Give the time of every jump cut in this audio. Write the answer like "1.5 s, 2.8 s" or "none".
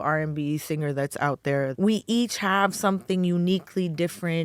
1.7 s